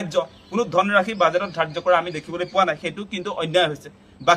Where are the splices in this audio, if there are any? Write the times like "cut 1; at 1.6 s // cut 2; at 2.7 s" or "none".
cut 1; at 1.8 s

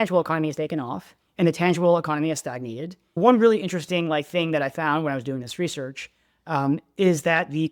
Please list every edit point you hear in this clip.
cut 1; at 3.2 s

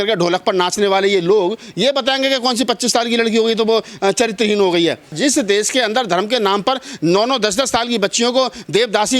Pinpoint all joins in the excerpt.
cut 1; at 5.1 s

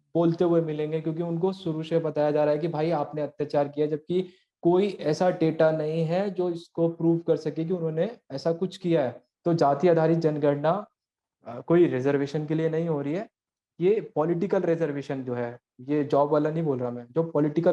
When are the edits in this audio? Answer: cut 1; at 9.3 s

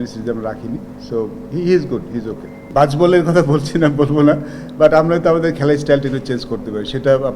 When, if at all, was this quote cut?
cut 1; at 2.7 s

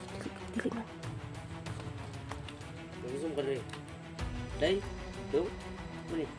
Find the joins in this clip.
none

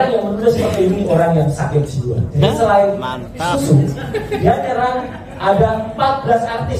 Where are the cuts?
cut 1; at 2.3 s

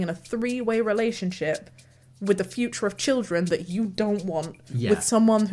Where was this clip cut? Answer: none

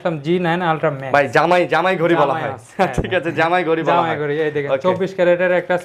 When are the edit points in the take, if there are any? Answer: none

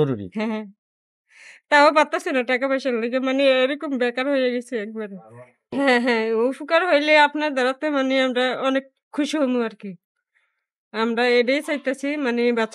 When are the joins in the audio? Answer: cut 1; at 5.6 s

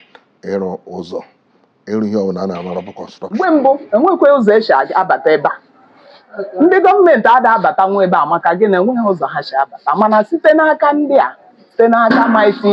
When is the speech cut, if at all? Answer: cut 1; at 3.3 s

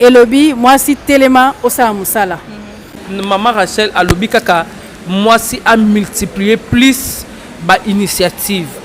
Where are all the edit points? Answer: cut 1; at 3.0 s

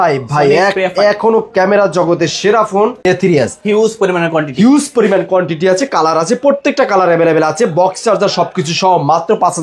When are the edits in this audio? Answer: cut 1; at 3.1 s

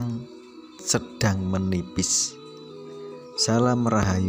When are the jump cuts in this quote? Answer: cut 1; at 2.1 s // cut 2; at 3.5 s

